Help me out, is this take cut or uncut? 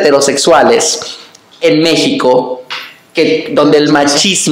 uncut